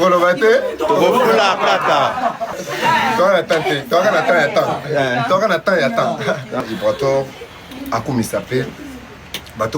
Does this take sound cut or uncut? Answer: cut